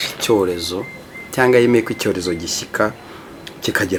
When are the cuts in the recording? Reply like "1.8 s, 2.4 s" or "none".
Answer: none